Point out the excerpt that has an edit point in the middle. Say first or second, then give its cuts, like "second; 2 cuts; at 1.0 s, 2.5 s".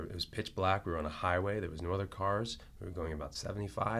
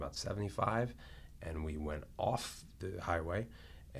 second; 1 cut; at 2.7 s